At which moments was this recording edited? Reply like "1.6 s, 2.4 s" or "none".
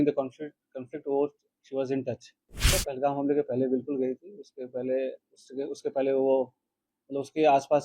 2.7 s